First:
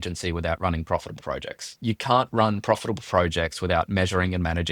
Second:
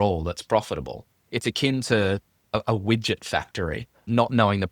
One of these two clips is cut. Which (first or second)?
first